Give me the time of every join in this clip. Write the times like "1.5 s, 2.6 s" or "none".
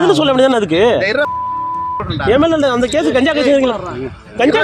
none